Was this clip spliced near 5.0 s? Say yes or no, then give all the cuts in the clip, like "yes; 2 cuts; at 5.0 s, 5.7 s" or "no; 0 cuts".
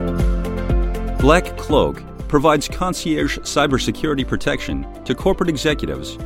no; 1 cut; at 1.2 s